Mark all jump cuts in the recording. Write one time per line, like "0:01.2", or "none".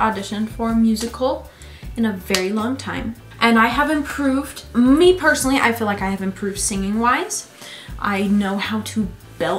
none